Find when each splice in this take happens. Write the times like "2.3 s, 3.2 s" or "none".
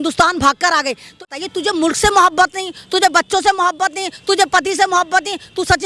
1.3 s